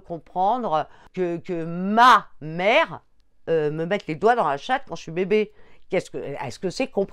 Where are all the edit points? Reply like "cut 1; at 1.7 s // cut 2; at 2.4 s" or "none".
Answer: cut 1; at 1.0 s